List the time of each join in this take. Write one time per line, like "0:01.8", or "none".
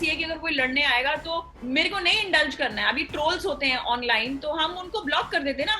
0:01.5